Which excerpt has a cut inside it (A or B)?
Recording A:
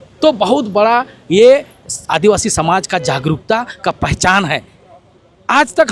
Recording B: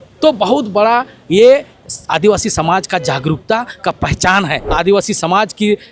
B